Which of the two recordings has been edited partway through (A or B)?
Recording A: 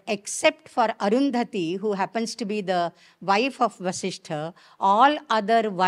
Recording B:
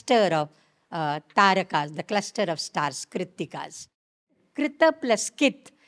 B